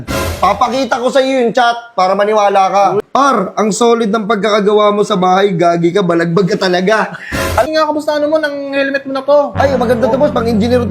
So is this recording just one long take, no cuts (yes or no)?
no